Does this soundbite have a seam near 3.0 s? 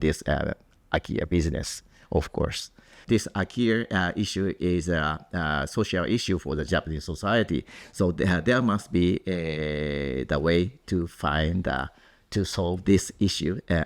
yes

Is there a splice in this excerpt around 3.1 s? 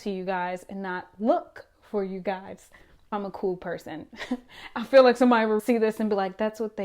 yes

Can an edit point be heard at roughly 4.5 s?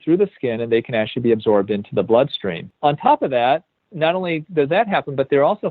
no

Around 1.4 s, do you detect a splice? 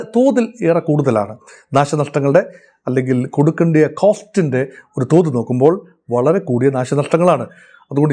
no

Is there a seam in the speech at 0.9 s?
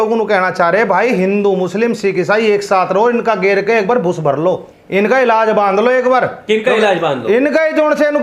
no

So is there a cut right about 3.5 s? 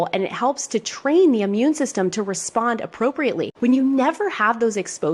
yes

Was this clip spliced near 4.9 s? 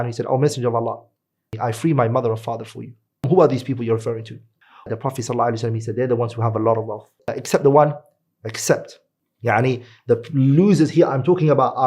yes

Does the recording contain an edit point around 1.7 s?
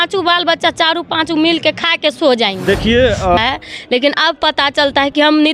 no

